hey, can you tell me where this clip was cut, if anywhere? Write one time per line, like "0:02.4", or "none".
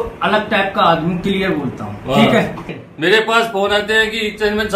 0:02.7